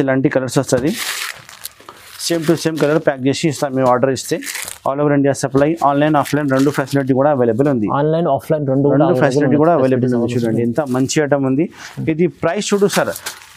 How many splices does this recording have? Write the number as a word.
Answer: zero